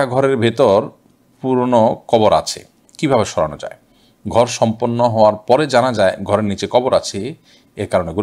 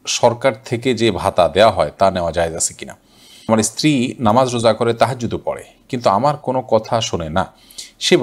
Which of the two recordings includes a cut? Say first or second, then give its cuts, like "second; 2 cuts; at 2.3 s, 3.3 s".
second; 1 cut; at 3.5 s